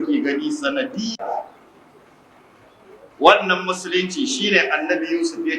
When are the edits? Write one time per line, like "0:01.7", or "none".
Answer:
0:01.2